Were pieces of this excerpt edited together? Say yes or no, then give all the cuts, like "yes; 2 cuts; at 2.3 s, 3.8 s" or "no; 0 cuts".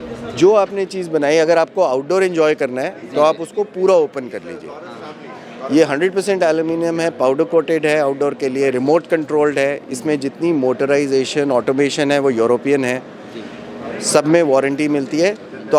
no; 0 cuts